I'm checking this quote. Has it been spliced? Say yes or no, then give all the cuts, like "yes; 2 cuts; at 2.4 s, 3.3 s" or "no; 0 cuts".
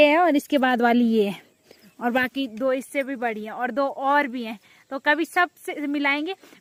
no; 0 cuts